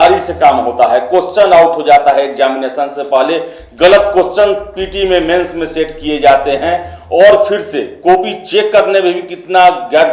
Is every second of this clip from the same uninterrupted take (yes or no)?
yes